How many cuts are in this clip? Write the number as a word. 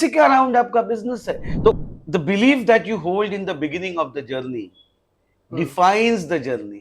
one